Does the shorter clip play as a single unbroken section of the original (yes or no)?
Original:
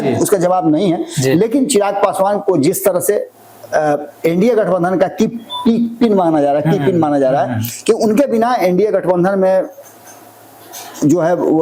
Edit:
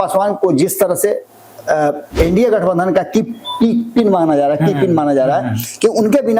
yes